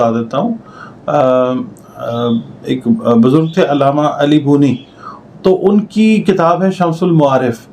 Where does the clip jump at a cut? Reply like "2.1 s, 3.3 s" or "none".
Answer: none

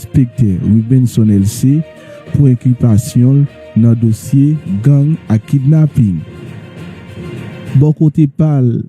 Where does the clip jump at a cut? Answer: 6.3 s, 7.7 s

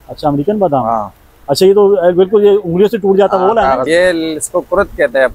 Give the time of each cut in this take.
3.8 s

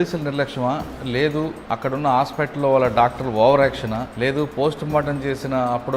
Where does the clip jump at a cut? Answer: 1.6 s, 4.1 s

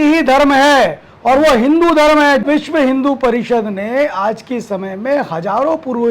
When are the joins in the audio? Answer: 2.4 s

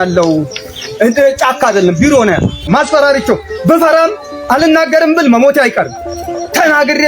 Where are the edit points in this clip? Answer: 2.6 s

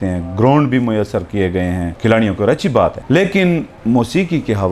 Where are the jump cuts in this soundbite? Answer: 1.9 s, 3.0 s, 3.7 s

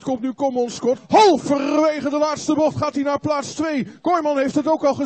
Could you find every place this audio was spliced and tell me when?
1.0 s

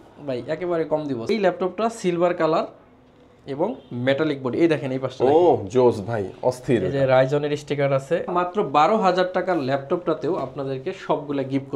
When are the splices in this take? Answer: 1.3 s, 8.3 s

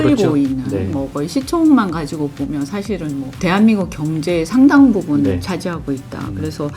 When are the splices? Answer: 3.3 s

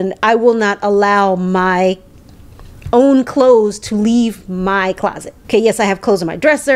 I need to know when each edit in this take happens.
5.3 s

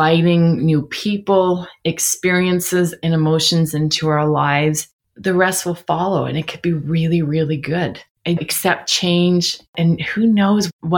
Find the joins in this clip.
9.7 s

